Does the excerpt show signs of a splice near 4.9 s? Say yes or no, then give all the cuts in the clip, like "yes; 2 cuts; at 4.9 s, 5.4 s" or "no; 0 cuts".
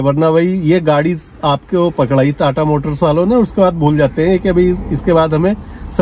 no; 0 cuts